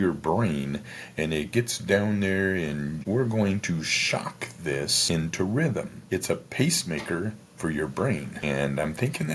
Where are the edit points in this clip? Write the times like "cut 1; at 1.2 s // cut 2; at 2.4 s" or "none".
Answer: cut 1; at 3.0 s // cut 2; at 5.0 s // cut 3; at 6.0 s // cut 4; at 8.4 s